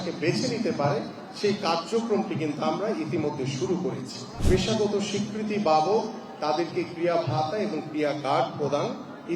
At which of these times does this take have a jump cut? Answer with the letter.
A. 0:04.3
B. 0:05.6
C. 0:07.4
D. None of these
A